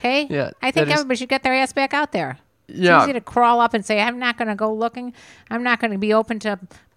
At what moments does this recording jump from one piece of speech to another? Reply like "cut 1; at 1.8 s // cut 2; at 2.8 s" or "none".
none